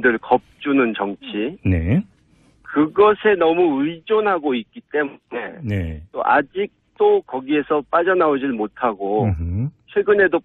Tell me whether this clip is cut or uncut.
uncut